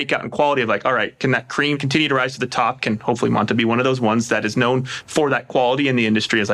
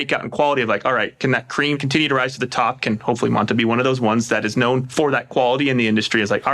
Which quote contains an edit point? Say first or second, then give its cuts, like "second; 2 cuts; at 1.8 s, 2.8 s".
second; 1 cut; at 4.9 s